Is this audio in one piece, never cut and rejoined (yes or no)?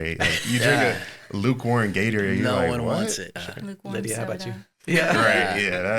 no